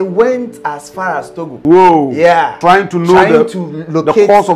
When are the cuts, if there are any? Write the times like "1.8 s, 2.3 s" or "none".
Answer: 1.5 s, 2.5 s